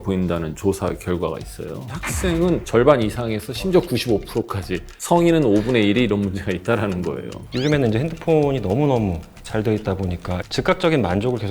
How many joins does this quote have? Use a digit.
3